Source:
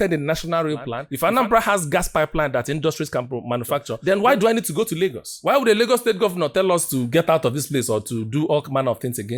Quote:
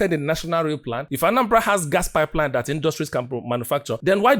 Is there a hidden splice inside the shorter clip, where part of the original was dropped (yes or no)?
no